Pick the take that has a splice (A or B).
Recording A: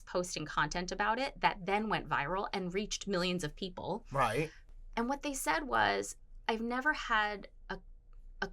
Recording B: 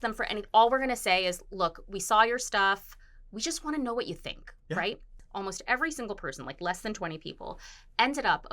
B